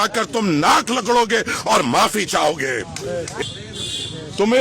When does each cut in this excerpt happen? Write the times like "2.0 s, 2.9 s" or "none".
3.4 s